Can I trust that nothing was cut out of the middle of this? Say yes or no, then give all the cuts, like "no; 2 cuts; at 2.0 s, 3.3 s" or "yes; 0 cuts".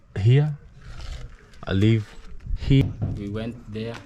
no; 1 cut; at 2.8 s